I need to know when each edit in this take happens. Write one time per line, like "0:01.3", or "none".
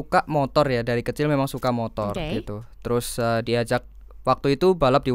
none